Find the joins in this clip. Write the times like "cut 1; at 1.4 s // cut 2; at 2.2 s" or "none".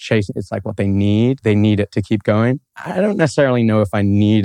cut 1; at 1.4 s